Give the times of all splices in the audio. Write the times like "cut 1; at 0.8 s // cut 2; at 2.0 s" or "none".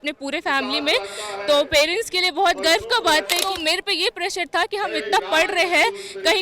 cut 1; at 3.4 s